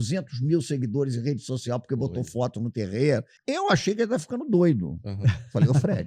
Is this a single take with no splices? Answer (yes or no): no